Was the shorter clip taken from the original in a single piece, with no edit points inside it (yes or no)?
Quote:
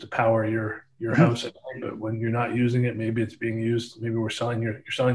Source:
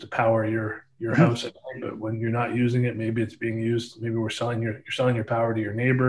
yes